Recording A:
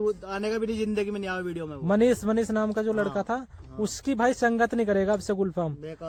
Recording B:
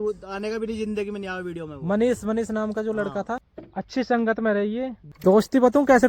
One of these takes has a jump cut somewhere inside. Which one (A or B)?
B